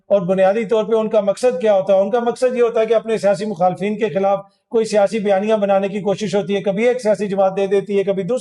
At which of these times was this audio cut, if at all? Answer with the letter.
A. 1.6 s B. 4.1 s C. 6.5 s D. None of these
D